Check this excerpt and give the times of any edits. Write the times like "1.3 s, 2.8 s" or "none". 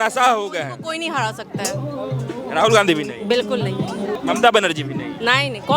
4.2 s

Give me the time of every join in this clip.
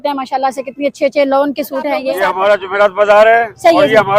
2.1 s

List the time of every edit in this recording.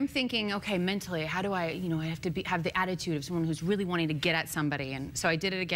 1.5 s

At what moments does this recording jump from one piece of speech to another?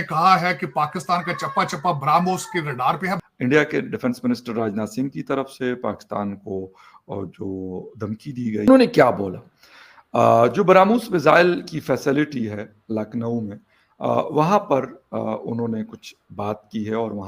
3.2 s, 8.7 s

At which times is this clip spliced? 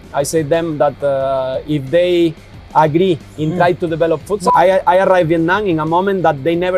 4.5 s

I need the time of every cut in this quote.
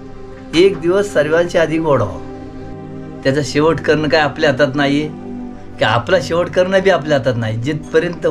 2.6 s

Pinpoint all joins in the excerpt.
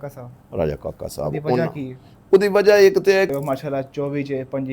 3.3 s

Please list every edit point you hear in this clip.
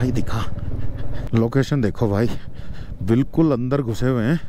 1.2 s

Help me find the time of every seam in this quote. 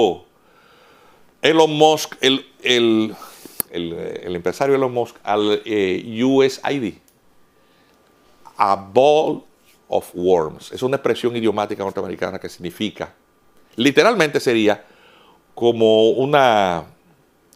none

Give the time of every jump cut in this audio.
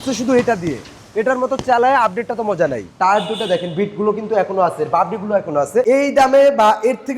2.9 s, 5.8 s

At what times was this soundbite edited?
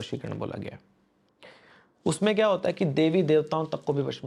none

